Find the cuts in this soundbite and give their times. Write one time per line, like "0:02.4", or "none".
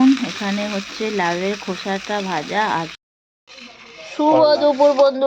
0:02.9